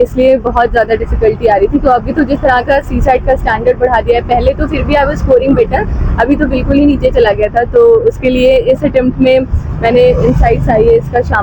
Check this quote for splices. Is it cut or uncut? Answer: uncut